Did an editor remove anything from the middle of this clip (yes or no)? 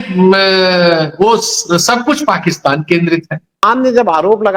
yes